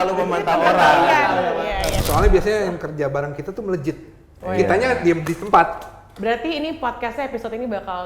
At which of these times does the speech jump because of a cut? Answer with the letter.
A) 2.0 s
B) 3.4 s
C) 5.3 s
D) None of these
A